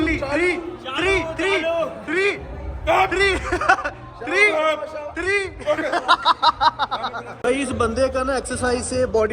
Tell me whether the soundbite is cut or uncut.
cut